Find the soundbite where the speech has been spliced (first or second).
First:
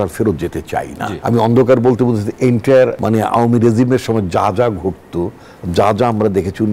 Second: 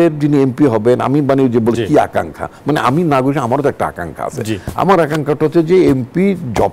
first